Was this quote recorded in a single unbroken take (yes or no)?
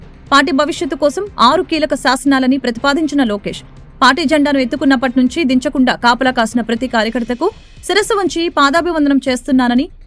yes